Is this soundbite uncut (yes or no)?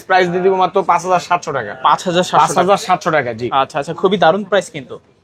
yes